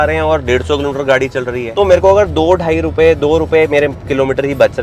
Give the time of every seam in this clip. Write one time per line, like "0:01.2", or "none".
0:01.6